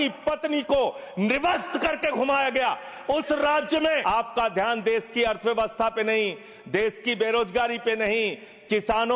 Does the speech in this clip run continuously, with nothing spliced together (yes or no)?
no